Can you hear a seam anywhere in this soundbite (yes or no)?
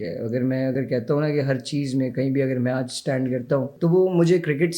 yes